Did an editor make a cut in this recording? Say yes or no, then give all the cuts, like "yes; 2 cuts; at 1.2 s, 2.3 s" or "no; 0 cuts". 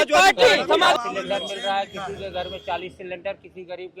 yes; 1 cut; at 0.9 s